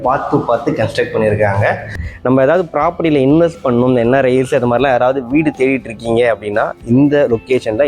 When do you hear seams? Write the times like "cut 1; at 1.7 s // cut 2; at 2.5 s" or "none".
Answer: cut 1; at 1.9 s

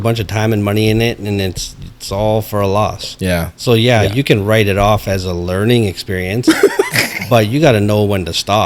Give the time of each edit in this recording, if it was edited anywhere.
none

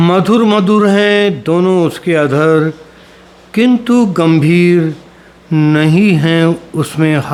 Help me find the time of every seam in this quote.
none

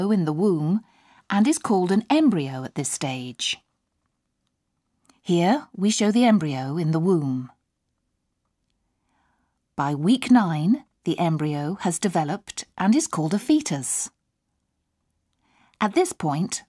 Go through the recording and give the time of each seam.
cut 1; at 14.7 s

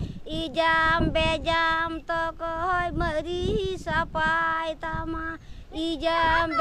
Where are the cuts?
none

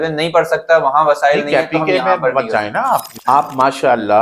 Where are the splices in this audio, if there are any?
cut 1; at 3.1 s

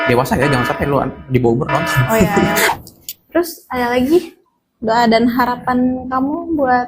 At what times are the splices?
cut 1; at 2.7 s

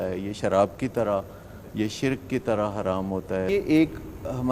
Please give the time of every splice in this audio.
cut 1; at 3.5 s

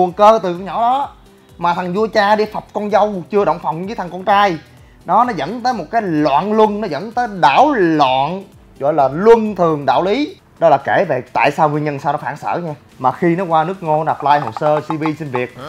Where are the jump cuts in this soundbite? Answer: cut 1; at 10.4 s // cut 2; at 12.8 s

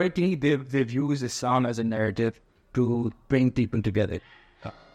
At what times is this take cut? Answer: none

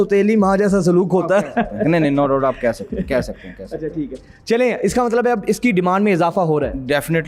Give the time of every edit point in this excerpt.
none

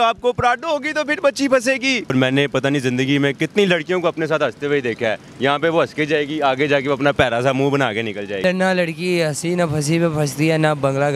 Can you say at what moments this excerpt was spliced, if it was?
cut 1; at 2.1 s // cut 2; at 8.4 s

